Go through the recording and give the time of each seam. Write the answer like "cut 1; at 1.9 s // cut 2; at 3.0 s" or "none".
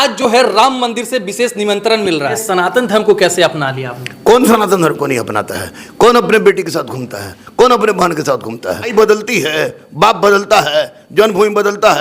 cut 1; at 2.4 s // cut 2; at 8.9 s

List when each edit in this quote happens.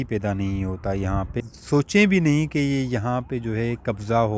cut 1; at 1.3 s

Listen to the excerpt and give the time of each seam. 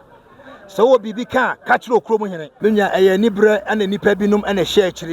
cut 1; at 2.4 s

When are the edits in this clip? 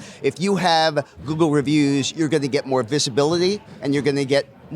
cut 1; at 3.7 s

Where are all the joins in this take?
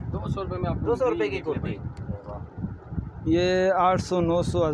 none

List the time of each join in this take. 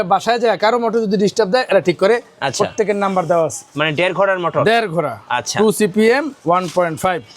cut 1; at 3.7 s

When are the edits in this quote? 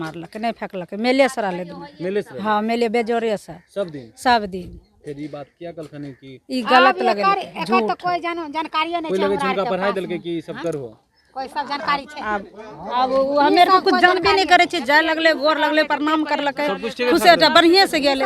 none

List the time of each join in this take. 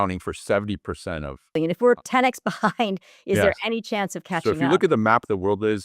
cut 1; at 1.5 s // cut 2; at 4.4 s

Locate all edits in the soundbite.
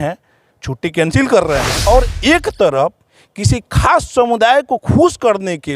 cut 1; at 1.7 s

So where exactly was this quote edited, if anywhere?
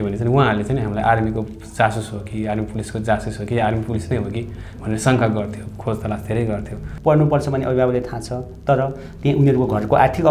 cut 1; at 6.9 s

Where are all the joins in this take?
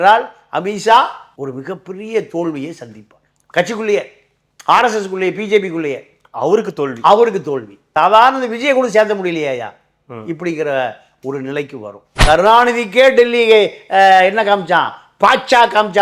cut 1; at 12.1 s

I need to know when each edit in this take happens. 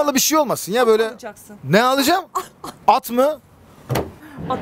none

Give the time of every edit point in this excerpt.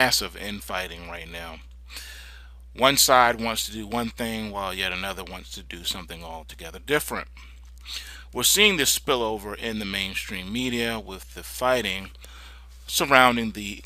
cut 1; at 12.9 s

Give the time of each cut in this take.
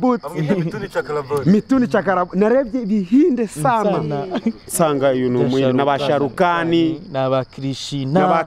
none

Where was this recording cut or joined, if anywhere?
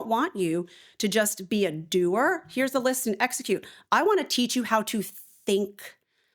none

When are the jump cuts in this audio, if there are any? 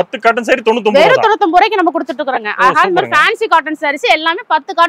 none

